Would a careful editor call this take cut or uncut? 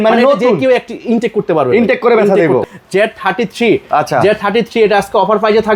cut